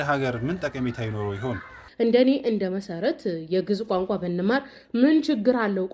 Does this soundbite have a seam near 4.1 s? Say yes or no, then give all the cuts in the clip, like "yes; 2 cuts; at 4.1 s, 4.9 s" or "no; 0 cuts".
no; 1 cut; at 1.8 s